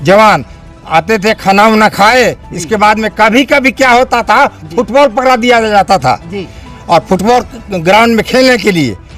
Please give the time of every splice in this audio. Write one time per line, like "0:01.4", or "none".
none